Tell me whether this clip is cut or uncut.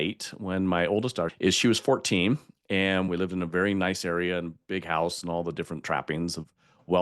cut